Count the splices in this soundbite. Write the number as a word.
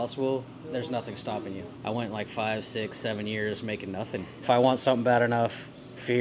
two